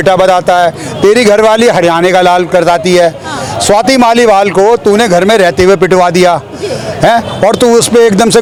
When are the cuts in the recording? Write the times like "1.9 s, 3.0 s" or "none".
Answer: none